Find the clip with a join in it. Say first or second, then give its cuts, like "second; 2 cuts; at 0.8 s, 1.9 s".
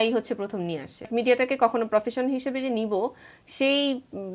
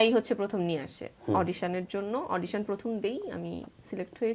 first; 1 cut; at 1.1 s